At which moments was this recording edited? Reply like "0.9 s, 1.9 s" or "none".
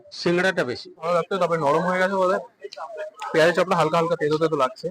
1.1 s